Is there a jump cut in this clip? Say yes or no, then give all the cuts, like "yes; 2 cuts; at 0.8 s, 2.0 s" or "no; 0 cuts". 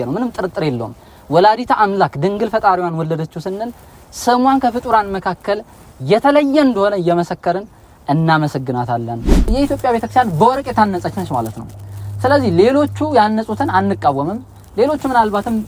yes; 1 cut; at 9.5 s